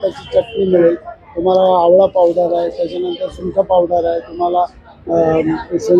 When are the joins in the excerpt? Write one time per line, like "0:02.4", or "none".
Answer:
none